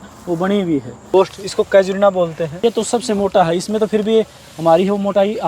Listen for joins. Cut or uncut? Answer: cut